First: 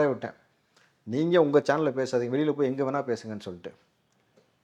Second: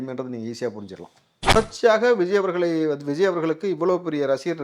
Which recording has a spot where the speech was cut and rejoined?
second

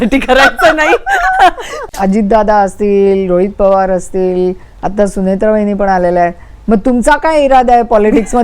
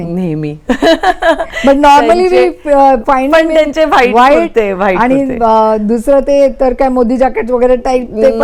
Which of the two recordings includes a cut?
first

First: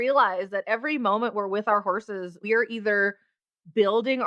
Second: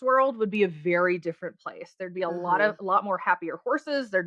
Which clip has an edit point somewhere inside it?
first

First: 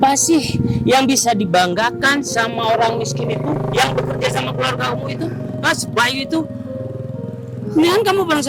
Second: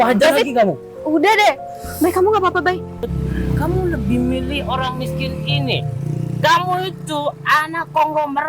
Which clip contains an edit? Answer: second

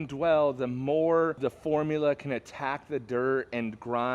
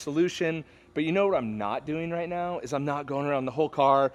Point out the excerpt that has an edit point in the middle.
first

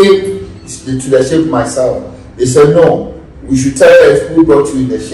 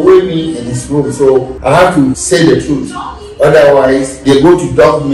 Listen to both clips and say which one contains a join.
second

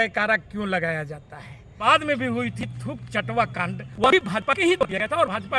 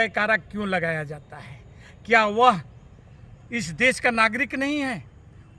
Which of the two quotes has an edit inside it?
first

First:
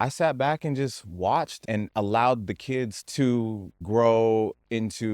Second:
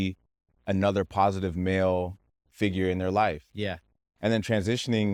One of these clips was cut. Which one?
first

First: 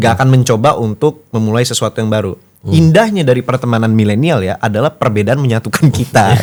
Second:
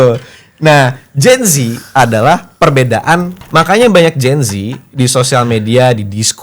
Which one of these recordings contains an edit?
second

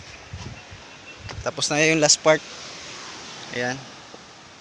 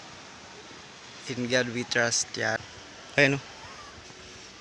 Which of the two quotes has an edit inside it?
second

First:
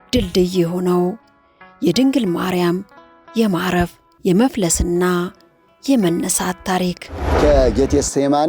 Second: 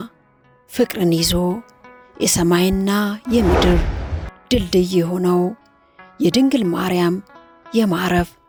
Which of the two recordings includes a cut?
first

